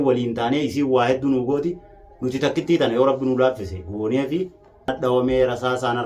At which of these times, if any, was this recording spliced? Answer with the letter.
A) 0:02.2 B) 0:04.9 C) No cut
B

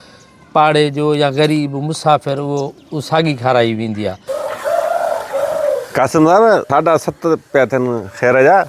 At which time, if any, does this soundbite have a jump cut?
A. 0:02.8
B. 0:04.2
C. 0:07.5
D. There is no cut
B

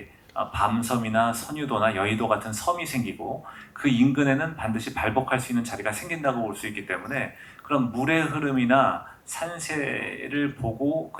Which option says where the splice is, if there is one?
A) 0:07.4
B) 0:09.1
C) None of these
C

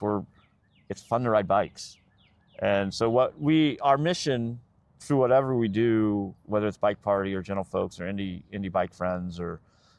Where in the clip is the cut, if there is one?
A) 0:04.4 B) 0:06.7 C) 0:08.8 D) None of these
D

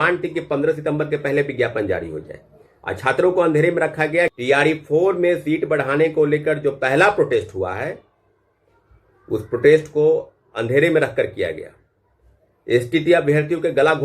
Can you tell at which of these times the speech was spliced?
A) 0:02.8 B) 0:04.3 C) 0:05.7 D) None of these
B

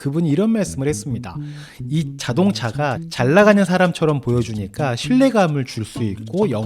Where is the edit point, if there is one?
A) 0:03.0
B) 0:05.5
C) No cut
A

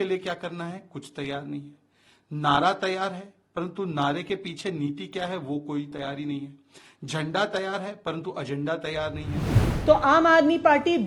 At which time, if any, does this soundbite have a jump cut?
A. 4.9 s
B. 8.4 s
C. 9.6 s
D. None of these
C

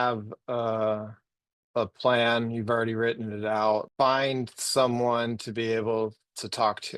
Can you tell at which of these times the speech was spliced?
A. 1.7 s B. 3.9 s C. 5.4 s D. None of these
B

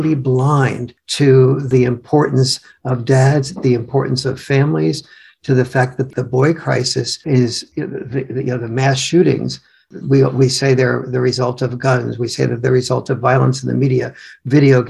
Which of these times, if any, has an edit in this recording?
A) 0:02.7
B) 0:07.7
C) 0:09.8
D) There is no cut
D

